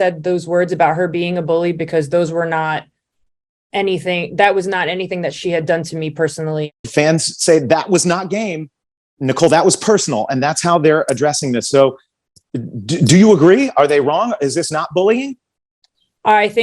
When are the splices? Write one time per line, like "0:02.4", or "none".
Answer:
0:06.8